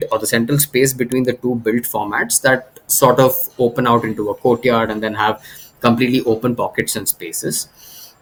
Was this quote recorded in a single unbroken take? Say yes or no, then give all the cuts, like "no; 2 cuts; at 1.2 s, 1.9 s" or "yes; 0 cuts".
yes; 0 cuts